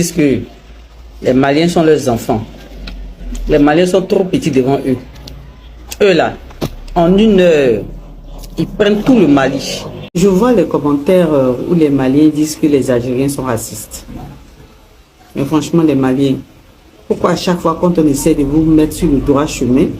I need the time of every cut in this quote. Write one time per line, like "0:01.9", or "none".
0:10.0